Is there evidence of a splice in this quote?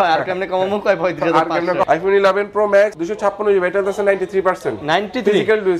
yes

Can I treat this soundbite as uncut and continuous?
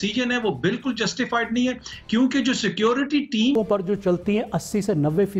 no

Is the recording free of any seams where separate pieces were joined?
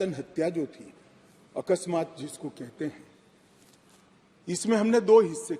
yes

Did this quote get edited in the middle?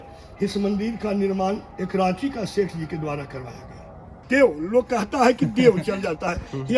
yes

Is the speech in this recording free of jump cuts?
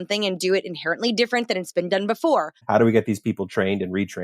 no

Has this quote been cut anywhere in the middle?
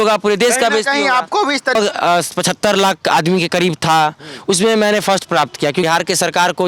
yes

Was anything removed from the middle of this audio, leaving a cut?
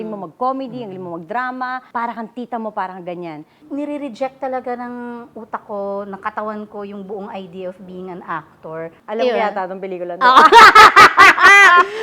yes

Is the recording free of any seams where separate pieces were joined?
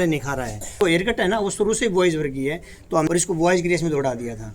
no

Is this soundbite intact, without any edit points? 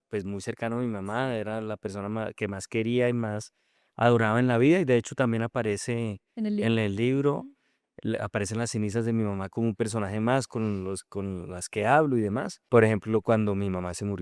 no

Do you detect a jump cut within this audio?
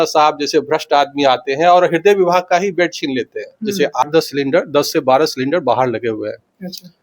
yes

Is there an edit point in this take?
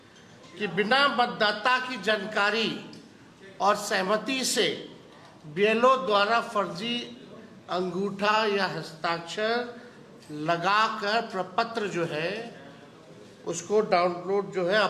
no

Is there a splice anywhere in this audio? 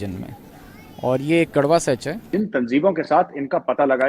yes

